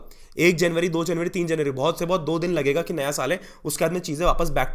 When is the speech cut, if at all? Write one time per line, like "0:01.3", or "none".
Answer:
none